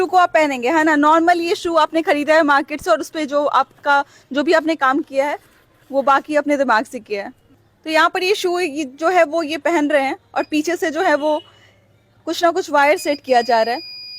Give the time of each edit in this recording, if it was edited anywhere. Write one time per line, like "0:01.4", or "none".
none